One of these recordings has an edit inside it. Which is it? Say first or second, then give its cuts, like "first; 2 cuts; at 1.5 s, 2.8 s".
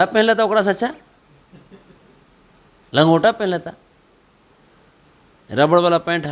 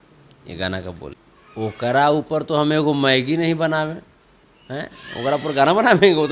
second; 1 cut; at 1.1 s